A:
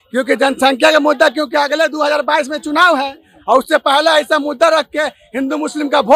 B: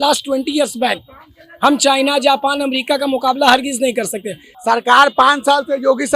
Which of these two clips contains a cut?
B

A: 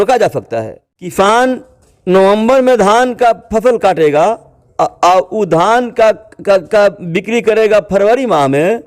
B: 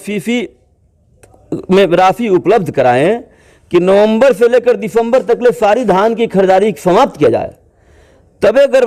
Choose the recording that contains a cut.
A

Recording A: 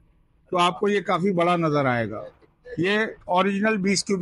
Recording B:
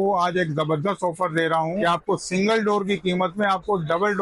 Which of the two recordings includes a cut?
B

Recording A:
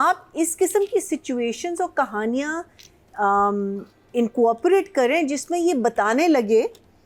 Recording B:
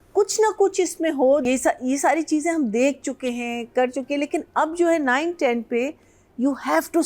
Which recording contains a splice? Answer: B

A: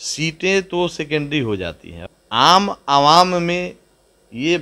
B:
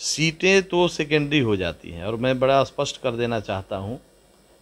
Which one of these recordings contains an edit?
A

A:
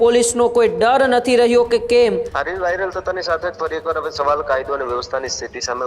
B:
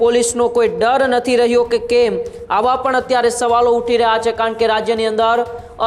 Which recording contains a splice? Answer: A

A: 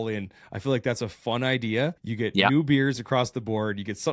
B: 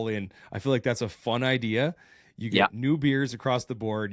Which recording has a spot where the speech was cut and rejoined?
A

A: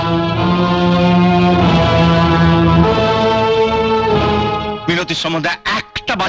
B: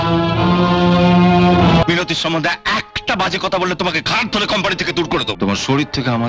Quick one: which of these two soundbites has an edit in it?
B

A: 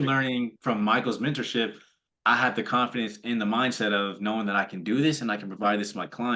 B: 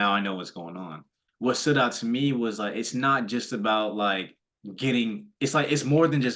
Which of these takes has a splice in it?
B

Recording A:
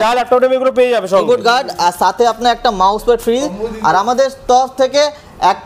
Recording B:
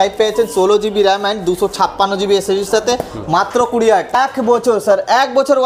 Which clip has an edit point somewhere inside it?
B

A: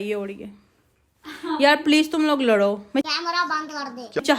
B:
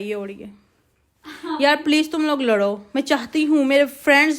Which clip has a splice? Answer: B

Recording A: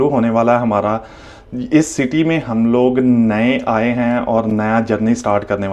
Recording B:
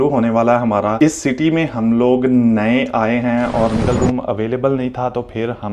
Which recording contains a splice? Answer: B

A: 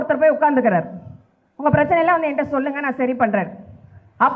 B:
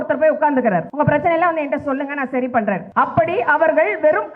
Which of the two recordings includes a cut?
B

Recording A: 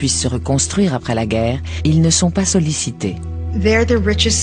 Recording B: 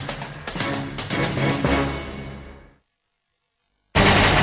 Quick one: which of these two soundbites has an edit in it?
B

